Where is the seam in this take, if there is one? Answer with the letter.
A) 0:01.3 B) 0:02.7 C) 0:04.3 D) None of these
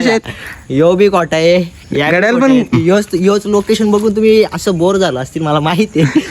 B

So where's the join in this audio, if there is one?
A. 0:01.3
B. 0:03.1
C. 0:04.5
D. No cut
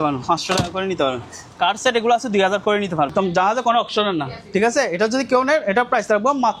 B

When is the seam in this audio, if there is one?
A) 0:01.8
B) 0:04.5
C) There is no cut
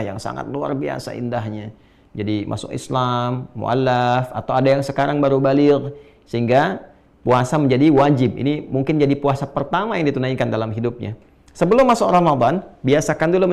C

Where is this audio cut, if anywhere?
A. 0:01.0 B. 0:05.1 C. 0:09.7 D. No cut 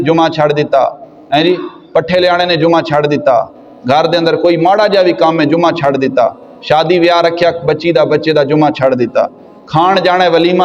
D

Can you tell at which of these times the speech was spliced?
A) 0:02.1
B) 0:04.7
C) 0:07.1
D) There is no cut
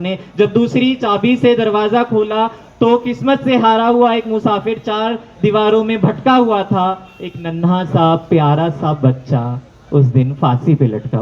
D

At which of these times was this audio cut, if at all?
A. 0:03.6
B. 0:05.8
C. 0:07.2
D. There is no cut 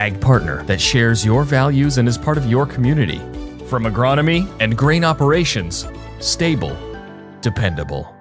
B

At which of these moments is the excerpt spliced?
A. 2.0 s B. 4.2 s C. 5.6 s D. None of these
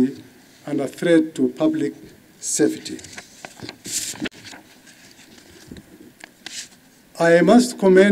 D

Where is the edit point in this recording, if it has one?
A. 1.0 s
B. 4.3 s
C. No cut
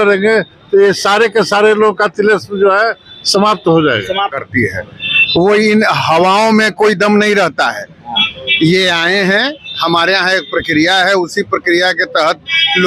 B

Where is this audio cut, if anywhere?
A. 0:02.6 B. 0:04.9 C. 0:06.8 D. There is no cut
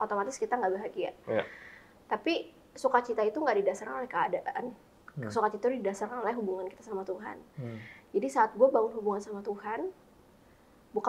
D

